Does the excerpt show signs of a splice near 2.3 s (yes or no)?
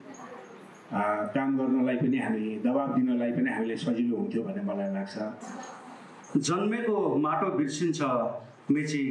no